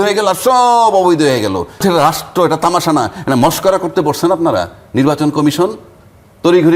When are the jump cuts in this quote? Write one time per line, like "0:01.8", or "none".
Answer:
0:01.8